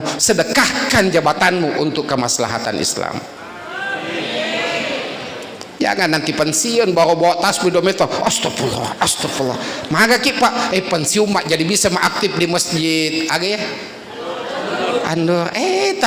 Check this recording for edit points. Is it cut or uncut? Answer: uncut